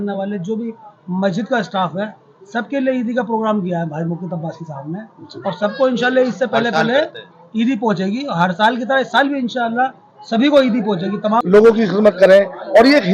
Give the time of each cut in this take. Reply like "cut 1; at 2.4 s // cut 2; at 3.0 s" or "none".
cut 1; at 11.4 s

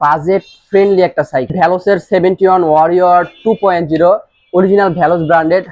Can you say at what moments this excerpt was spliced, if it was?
cut 1; at 1.5 s

